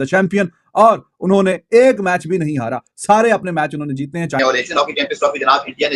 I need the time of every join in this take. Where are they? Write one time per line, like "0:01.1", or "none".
0:04.4